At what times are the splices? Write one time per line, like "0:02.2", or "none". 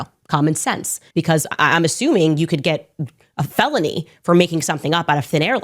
0:01.0